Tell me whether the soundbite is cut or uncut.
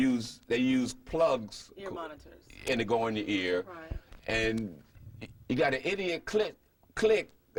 uncut